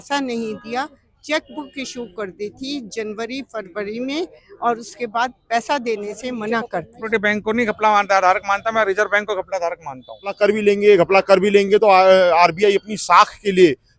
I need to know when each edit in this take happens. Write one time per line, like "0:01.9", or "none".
0:07.0
0:10.4